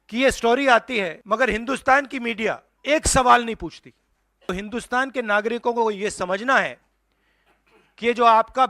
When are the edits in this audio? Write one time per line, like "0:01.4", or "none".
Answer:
0:01.2
0:02.7
0:04.5